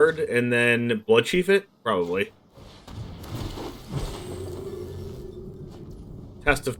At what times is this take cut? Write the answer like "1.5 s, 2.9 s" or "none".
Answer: none